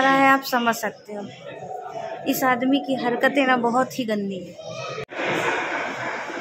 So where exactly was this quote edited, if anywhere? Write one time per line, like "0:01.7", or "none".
0:05.1